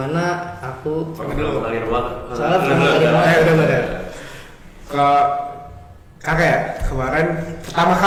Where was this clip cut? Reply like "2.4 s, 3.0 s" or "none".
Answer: none